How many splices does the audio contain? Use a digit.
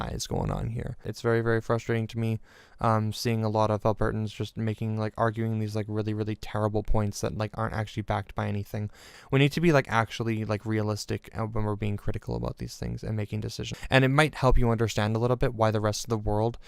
2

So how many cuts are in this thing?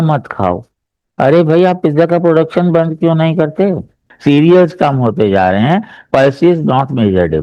1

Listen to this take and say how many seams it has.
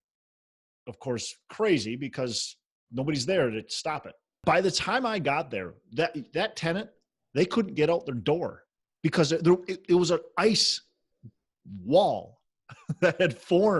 1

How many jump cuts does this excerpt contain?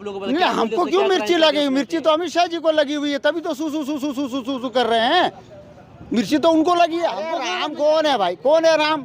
1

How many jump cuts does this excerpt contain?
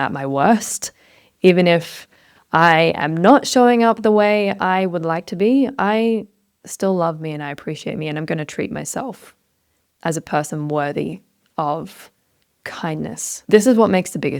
1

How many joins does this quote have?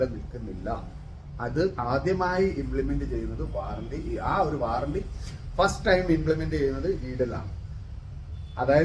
0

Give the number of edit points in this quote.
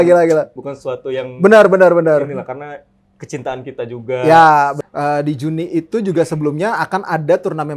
1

